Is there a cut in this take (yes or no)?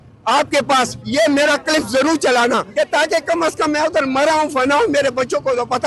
yes